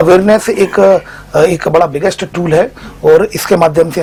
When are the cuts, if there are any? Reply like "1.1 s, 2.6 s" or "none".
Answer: none